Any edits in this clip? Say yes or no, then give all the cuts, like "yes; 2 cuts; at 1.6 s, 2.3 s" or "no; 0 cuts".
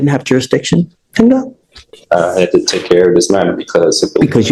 no; 0 cuts